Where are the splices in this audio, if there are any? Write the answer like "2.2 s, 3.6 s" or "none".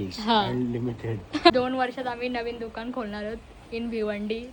1.5 s